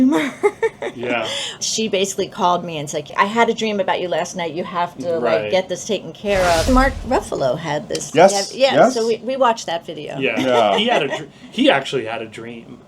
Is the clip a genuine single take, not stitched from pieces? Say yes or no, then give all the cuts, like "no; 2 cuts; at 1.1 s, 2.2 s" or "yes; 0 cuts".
no; 3 cuts; at 1.6 s, 3.1 s, 6.7 s